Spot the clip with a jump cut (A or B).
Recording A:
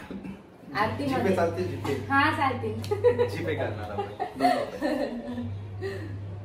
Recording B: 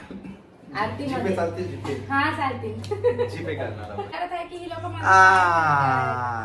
B